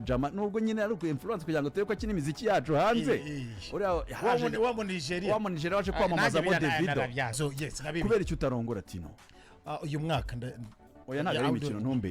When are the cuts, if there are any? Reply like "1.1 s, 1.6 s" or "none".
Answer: 7.4 s